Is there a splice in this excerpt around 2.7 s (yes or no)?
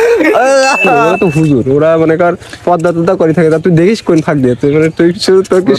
no